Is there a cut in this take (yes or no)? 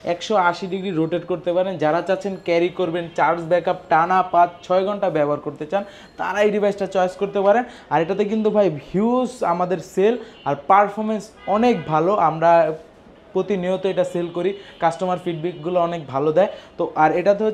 no